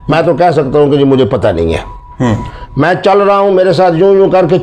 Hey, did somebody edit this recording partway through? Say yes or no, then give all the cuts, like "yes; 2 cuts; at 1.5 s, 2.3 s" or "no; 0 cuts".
no; 0 cuts